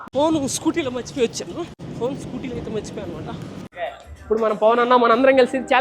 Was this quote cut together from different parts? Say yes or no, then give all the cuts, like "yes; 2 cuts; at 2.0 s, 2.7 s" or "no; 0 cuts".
yes; 1 cut; at 3.6 s